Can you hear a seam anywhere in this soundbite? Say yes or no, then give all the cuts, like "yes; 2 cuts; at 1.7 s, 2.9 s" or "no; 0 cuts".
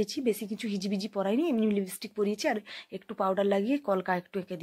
no; 0 cuts